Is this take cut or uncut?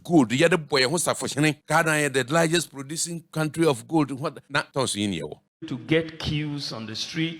cut